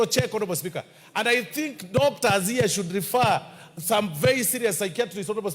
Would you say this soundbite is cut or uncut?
uncut